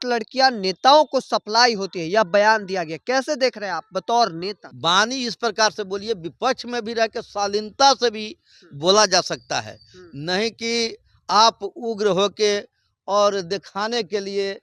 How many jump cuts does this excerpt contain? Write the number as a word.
one